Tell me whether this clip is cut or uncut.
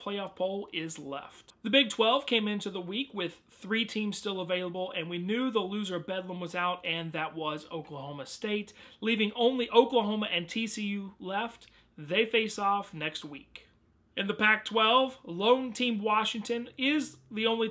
uncut